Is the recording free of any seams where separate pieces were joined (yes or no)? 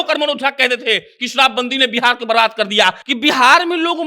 no